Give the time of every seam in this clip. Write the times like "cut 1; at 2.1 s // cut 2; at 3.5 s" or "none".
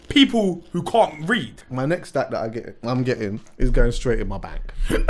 cut 1; at 1.6 s

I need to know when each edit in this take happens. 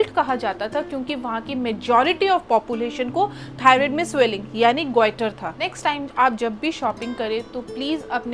cut 1; at 5.6 s

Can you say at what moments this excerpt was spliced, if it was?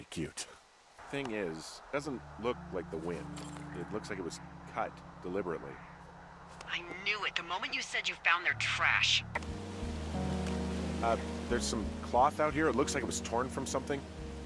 cut 1; at 0.9 s // cut 2; at 9.3 s

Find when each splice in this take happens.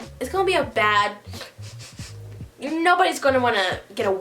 none

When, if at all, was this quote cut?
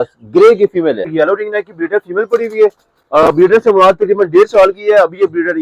cut 1; at 1.1 s

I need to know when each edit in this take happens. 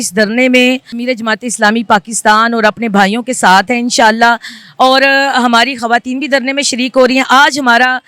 cut 1; at 0.9 s

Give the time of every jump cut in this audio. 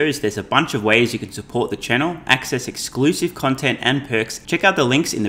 cut 1; at 4.4 s

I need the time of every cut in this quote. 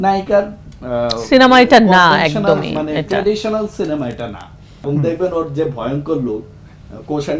cut 1; at 4.8 s

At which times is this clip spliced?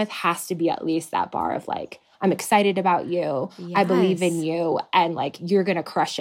none

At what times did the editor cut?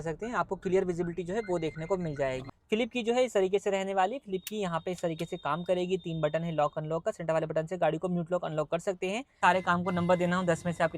cut 1; at 2.5 s // cut 2; at 9.4 s

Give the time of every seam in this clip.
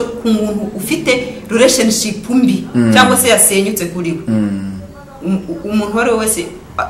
none

